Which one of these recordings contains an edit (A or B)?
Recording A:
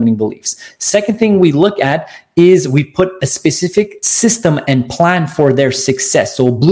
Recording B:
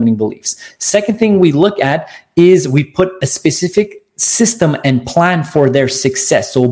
A